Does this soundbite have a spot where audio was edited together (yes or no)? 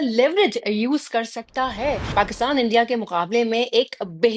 yes